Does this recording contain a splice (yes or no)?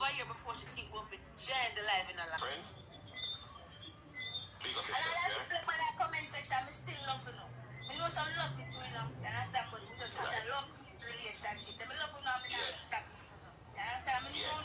yes